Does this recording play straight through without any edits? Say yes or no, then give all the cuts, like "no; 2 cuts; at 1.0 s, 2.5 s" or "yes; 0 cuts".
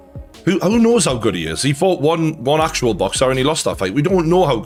yes; 0 cuts